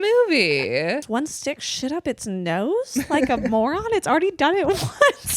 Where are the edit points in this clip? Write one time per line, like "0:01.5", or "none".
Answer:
0:01.0